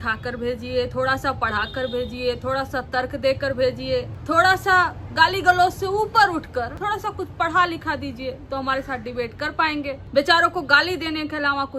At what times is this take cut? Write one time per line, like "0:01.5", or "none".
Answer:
0:04.2
0:06.7
0:10.0